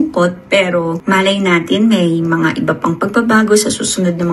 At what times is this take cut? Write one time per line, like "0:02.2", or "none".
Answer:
0:01.0